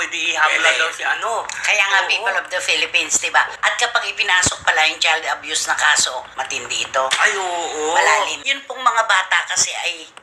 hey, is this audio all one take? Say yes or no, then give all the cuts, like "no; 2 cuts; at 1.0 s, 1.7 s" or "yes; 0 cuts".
no; 1 cut; at 8.5 s